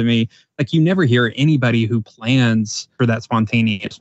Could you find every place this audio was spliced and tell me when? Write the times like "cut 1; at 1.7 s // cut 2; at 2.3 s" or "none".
cut 1; at 2.9 s